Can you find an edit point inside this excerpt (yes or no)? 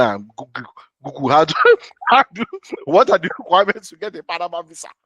no